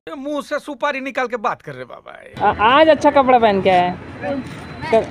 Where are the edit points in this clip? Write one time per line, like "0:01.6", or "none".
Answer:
0:02.2